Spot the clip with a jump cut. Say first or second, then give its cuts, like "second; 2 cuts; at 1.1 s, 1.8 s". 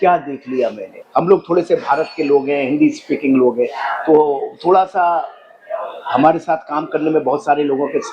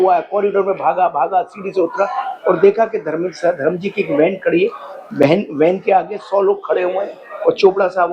first; 1 cut; at 1.0 s